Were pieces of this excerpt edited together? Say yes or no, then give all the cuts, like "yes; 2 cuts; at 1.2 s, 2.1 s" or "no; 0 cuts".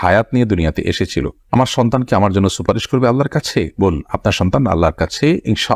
no; 0 cuts